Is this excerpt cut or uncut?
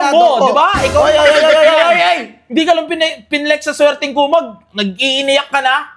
cut